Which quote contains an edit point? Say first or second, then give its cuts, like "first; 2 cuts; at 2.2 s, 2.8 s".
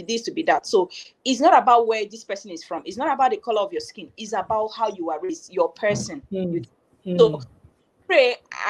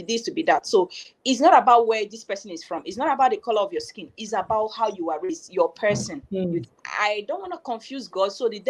second; 1 cut; at 6.8 s